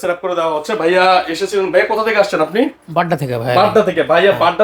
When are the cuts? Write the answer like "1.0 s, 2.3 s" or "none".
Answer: none